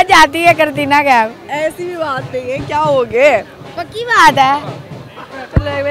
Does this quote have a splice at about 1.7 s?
no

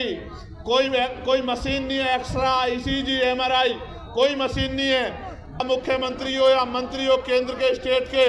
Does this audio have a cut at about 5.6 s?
yes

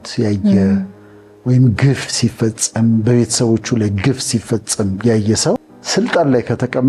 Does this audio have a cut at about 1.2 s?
no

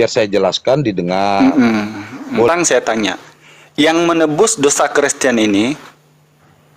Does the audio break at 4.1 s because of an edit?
no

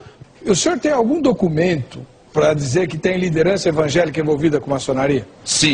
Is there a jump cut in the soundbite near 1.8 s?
no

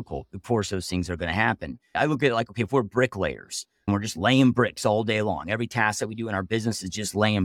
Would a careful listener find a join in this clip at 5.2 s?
no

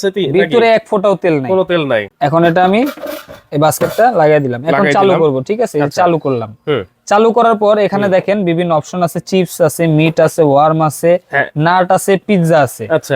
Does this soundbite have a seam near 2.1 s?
yes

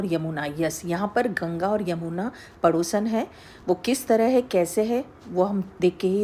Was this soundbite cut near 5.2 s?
no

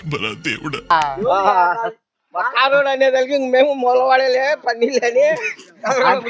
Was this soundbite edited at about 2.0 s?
no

